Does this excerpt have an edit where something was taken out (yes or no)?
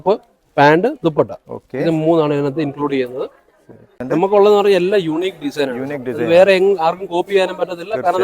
yes